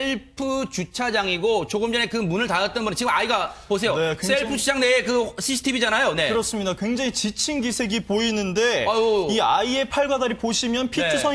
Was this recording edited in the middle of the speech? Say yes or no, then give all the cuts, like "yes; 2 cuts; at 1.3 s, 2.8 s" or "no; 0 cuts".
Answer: yes; 1 cut; at 6.0 s